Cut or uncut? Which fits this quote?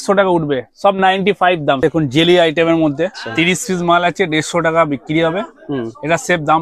cut